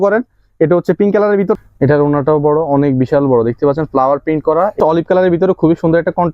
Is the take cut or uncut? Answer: cut